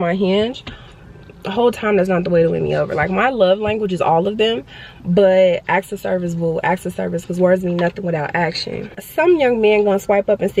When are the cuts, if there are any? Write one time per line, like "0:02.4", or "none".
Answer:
0:09.0